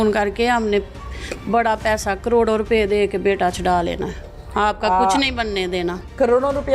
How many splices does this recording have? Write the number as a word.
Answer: zero